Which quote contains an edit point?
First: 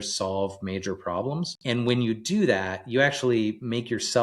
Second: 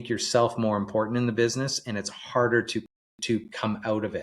first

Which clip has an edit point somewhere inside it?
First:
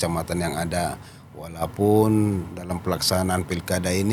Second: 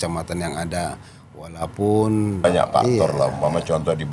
second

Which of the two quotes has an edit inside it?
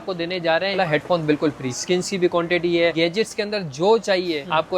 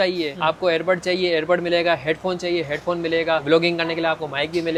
first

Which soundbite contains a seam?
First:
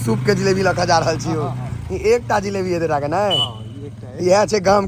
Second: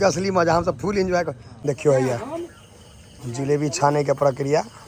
second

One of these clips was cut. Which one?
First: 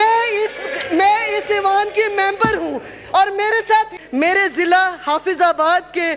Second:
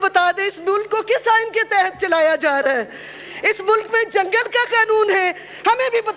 first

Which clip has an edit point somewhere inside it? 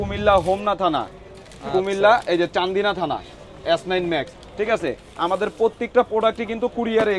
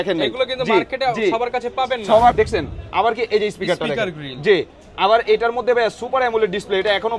second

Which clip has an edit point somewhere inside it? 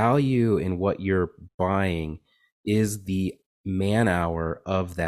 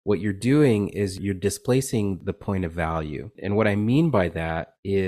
second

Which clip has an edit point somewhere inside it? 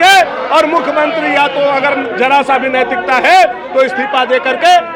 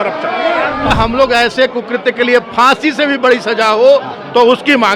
second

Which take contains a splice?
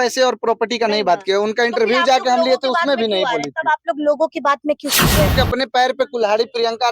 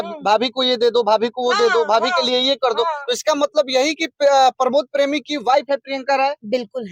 first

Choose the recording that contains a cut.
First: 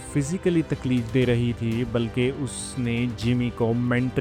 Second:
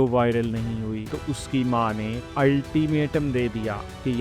second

